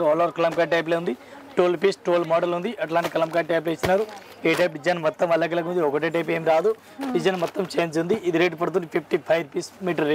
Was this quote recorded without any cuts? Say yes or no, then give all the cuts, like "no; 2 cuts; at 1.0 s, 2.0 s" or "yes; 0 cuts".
yes; 0 cuts